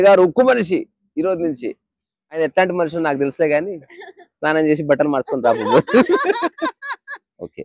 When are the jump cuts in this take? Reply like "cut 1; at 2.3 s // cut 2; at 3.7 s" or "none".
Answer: cut 1; at 2.4 s